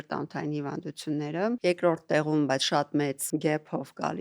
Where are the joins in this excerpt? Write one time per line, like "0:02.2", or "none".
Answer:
0:01.6
0:03.2